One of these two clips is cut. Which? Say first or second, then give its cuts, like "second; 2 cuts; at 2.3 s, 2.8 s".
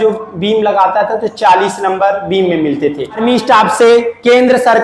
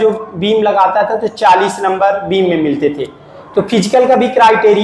first; 1 cut; at 3.2 s